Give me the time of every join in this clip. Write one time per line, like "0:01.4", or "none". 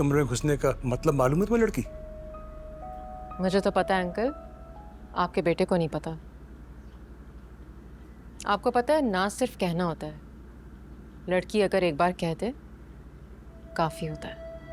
none